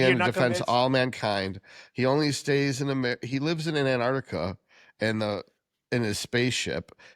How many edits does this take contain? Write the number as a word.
zero